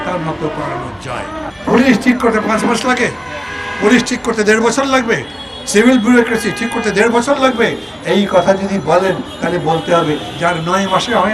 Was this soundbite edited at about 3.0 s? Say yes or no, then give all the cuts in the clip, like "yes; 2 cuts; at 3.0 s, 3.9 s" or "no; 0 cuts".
no; 1 cut; at 1.5 s